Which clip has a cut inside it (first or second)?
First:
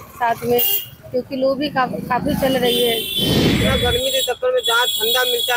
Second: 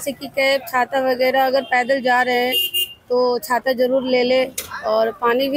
first